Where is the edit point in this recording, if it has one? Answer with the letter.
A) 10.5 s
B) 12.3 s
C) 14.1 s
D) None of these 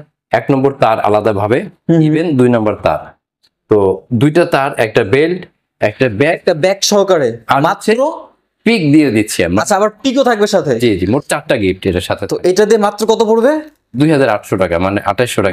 D